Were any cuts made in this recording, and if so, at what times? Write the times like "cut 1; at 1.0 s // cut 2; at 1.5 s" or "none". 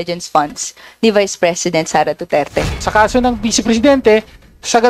cut 1; at 2.8 s

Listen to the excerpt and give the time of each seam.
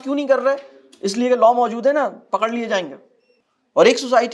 cut 1; at 3.1 s

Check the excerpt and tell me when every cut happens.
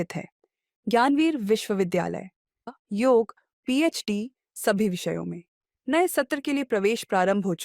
cut 1; at 2.7 s

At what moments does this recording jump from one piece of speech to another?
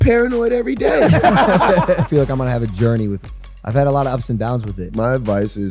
cut 1; at 2.0 s // cut 2; at 3.2 s // cut 3; at 4.8 s

